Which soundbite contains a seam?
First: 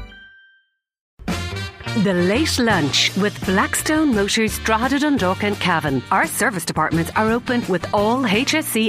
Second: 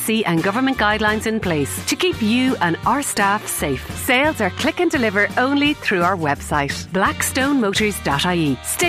first; 1 cut; at 1.2 s

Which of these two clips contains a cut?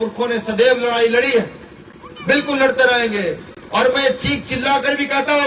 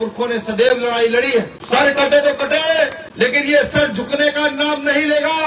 second; 2 cuts; at 1.6 s, 3.0 s

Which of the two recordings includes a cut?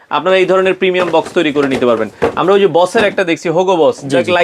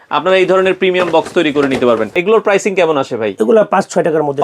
second; 1 cut; at 2.2 s

